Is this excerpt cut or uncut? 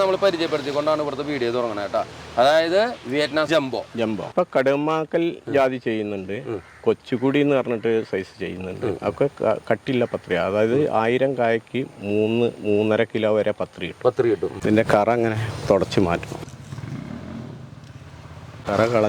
cut